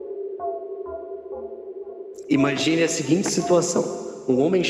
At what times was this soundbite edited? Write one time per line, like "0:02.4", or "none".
0:02.3